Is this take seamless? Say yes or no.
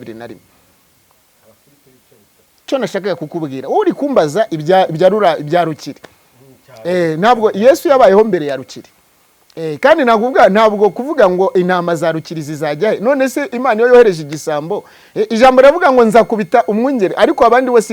no